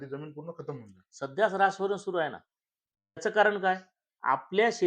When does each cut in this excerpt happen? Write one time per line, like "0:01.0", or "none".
0:03.2